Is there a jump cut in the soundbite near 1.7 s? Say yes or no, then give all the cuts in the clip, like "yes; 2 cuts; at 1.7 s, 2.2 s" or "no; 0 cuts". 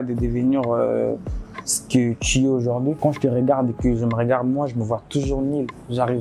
no; 1 cut; at 3.0 s